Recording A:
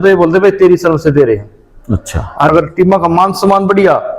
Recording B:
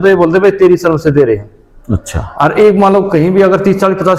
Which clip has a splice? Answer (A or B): A